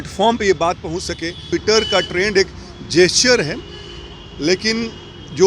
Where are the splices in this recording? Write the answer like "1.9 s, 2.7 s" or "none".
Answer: 1.5 s